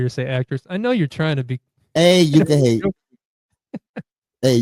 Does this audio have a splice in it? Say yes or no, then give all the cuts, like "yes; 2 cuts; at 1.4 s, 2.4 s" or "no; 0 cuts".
no; 0 cuts